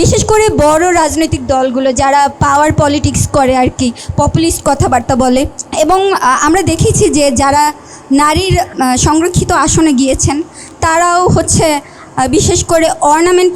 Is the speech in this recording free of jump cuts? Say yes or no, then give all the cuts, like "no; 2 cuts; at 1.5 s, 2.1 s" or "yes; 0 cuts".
no; 2 cuts; at 5.6 s, 8.7 s